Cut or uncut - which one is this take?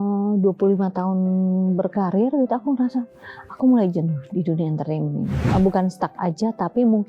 cut